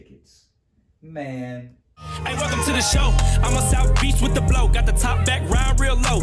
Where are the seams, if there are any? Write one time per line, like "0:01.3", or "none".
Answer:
0:02.2